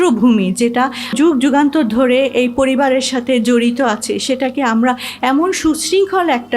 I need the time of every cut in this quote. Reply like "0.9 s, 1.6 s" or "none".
1.1 s